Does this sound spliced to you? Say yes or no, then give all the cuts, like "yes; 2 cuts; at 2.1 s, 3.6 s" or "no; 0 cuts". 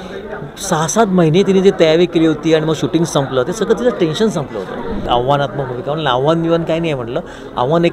yes; 1 cut; at 5.1 s